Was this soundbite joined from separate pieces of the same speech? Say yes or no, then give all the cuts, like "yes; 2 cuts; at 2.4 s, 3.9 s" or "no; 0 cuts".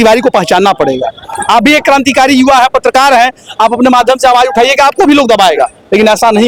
no; 0 cuts